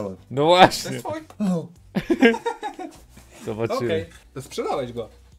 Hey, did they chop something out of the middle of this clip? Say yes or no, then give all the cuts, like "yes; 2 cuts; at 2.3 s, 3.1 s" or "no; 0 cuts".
no; 0 cuts